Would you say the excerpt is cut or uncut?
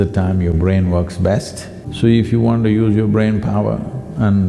cut